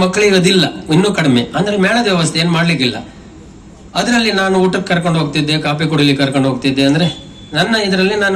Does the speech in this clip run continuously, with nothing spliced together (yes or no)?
yes